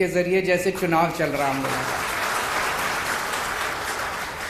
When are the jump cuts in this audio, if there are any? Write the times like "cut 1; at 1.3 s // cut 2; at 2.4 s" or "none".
none